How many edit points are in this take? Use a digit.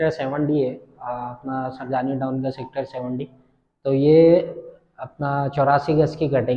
0